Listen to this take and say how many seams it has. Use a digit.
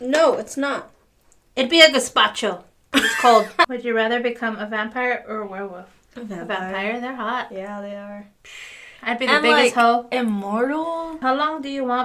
2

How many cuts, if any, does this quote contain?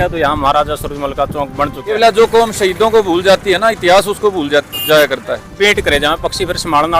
2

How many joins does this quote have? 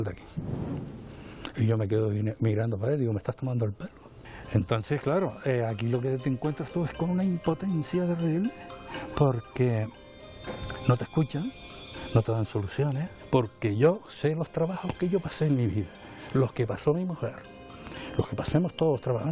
0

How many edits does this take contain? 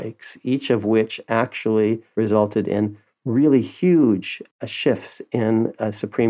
2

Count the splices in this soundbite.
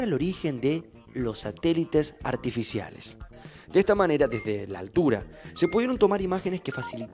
1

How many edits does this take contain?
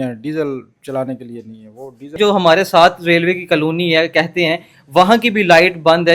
1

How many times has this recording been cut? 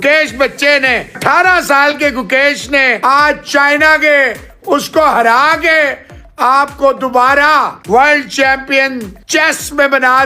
4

